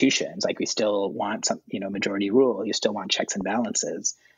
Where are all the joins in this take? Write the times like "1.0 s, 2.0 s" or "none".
none